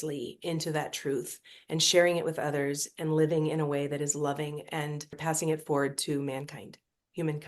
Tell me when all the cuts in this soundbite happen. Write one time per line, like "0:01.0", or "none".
0:05.2